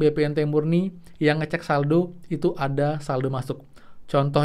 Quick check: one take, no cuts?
yes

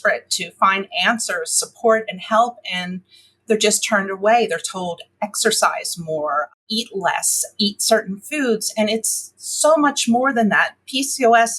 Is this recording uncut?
no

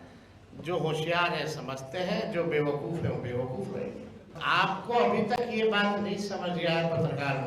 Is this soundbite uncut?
no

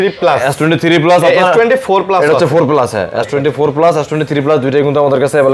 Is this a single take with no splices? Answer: yes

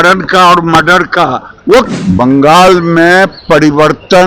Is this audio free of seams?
no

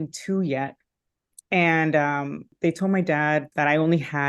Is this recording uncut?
no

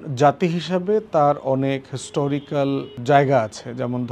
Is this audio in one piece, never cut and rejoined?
no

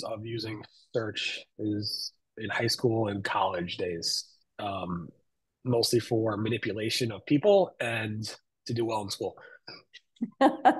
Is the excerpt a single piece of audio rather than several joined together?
yes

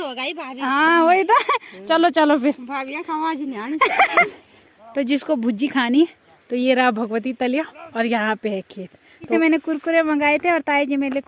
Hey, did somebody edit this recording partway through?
yes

